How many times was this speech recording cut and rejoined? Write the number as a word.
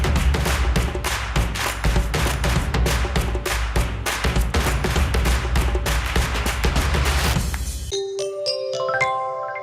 one